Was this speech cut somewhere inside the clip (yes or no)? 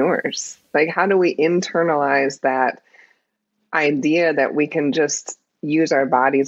no